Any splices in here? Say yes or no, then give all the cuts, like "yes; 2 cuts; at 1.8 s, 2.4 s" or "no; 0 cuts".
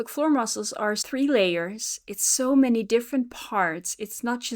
yes; 1 cut; at 1.0 s